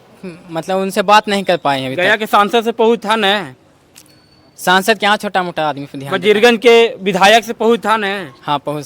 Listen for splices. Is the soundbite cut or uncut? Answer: uncut